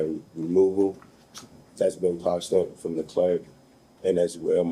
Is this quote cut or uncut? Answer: uncut